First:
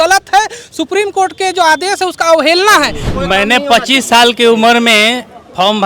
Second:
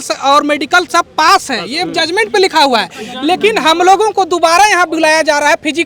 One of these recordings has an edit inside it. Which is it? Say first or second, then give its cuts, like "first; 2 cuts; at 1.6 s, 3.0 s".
first; 1 cut; at 3.1 s